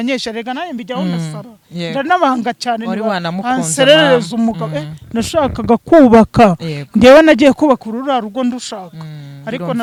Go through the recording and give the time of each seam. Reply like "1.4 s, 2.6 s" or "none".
none